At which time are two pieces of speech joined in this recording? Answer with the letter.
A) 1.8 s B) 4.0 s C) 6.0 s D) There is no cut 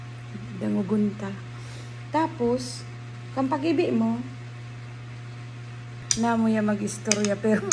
C